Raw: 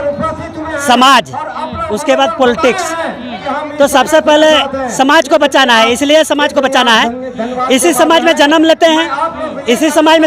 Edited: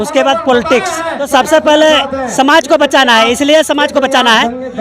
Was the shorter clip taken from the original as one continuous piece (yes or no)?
no